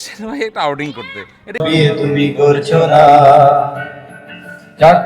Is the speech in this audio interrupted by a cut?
yes; 1 cut; at 1.6 s

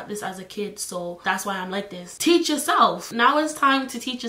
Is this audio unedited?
yes; 0 cuts

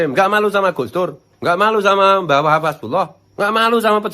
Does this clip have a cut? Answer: yes; 2 cuts; at 1.3 s, 3.2 s

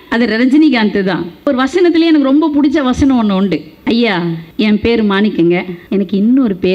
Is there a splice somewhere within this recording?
yes; 4 cuts; at 1.5 s, 3.7 s, 4.4 s, 5.8 s

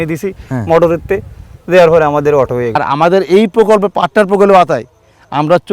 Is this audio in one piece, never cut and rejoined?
no; 1 cut; at 2.8 s

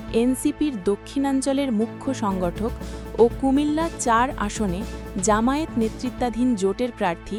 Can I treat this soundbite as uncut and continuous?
yes; 0 cuts

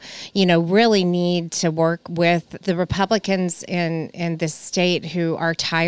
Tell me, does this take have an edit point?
yes; 1 cut; at 2.5 s

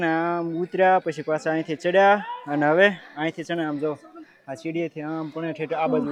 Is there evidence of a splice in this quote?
no; 0 cuts

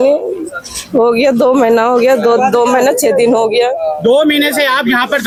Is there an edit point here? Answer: no; 0 cuts

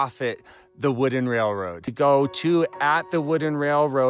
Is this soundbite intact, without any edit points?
no; 1 cut; at 1.8 s

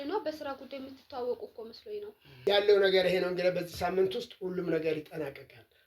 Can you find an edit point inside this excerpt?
yes; 1 cut; at 2.4 s

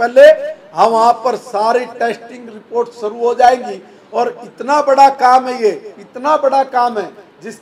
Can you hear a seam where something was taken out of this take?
no; 0 cuts

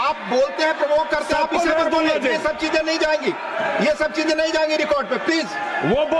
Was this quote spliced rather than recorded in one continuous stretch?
no; 0 cuts

